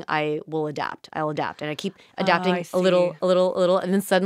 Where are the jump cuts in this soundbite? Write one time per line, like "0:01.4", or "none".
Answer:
none